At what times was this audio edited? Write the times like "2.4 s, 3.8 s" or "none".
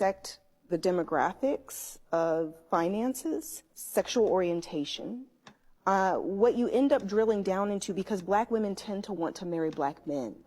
none